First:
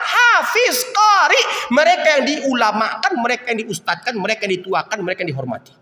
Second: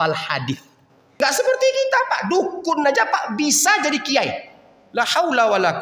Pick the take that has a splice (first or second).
second